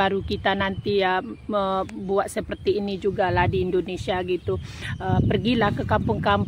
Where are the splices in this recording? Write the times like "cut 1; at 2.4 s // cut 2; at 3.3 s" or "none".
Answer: none